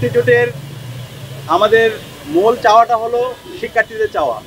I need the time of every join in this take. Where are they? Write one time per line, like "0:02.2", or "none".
none